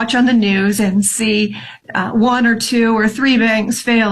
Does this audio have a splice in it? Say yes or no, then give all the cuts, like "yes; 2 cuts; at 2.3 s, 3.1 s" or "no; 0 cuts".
no; 0 cuts